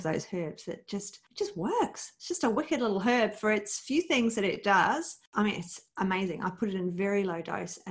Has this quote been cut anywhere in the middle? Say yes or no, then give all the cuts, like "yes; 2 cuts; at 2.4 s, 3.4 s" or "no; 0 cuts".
yes; 2 cuts; at 1.2 s, 5.2 s